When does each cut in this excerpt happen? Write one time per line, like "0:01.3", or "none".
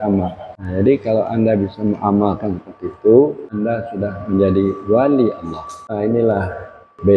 0:05.9

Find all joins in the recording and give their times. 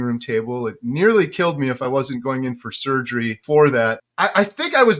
0:03.4
0:04.0

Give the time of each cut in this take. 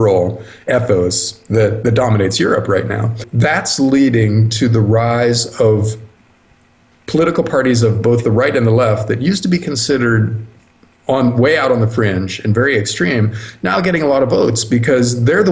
0:03.2

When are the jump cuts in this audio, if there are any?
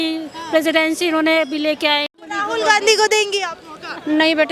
0:02.2

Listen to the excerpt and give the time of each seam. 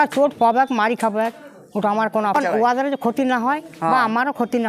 0:02.3

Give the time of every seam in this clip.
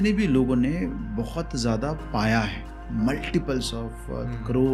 none

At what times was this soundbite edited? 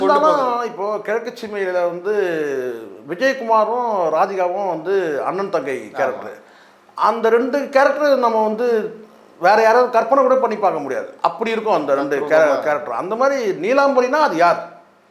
none

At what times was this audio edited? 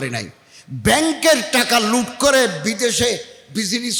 none

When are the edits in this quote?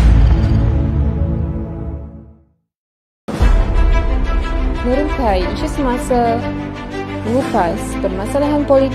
0:03.3

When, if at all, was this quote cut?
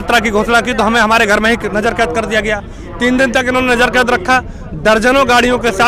none

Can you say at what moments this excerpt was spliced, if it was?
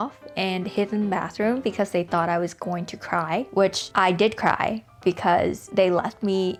none

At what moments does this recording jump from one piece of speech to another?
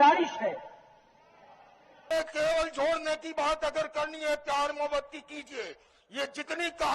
0:02.1

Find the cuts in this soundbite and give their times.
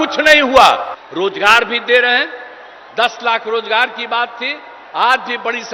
0:01.0

